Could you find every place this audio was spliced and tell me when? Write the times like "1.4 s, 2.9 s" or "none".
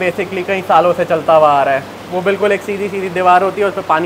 none